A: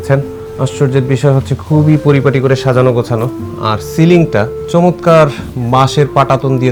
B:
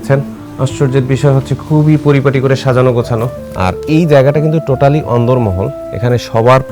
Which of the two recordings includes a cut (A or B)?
B